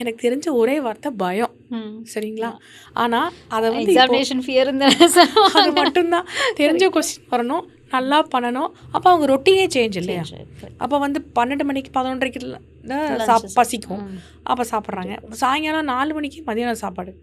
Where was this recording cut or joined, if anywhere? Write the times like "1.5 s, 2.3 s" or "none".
8.8 s